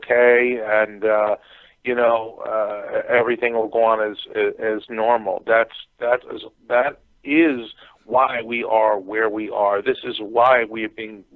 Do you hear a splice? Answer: yes; 1 cut; at 8.4 s

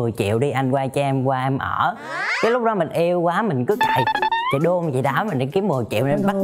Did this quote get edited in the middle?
no; 0 cuts

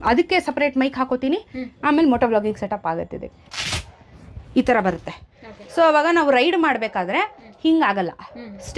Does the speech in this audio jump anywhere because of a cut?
yes; 1 cut; at 3.4 s

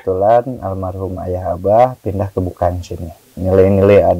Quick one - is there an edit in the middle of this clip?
yes; 1 cut; at 3.3 s

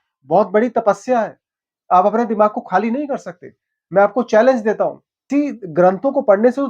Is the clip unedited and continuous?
no; 1 cut; at 5.3 s

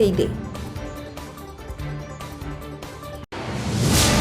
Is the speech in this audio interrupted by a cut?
yes; 1 cut; at 3.2 s

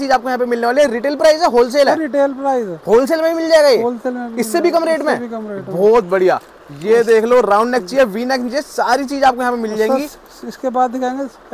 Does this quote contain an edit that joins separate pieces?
no; 0 cuts

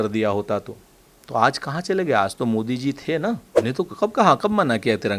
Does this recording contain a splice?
yes; 1 cut; at 3.5 s

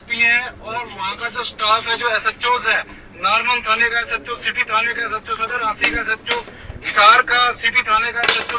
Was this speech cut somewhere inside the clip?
no; 0 cuts

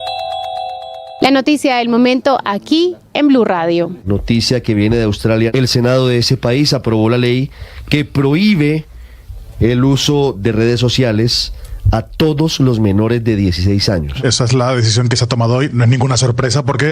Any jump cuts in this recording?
yes; 1 cut; at 1.1 s

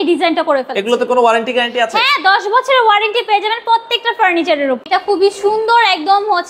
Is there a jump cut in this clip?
yes; 1 cut; at 4.8 s

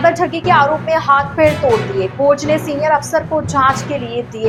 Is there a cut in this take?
no; 0 cuts

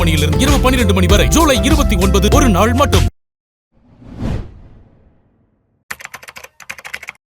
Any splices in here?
no; 0 cuts

